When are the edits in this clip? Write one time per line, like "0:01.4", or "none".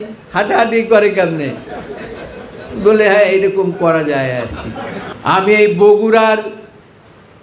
0:05.0